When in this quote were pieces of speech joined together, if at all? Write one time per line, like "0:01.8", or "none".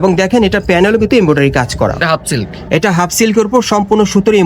0:02.0